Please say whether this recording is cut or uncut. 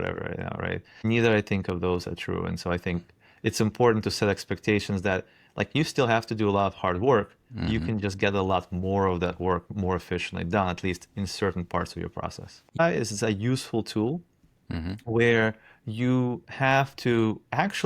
cut